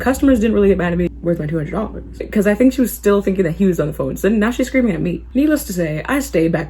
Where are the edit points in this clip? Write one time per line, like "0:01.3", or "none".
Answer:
0:01.1
0:02.2
0:05.2